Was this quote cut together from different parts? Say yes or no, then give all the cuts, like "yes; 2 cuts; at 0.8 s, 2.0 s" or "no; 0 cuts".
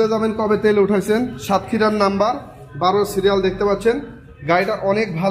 no; 0 cuts